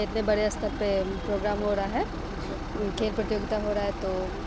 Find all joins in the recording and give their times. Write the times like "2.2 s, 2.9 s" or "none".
none